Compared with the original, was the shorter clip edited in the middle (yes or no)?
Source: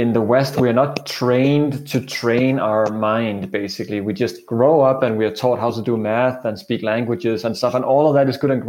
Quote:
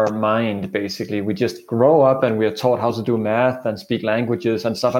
no